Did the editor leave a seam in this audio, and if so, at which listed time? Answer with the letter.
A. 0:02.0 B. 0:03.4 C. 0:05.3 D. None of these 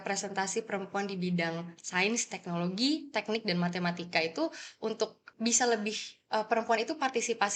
C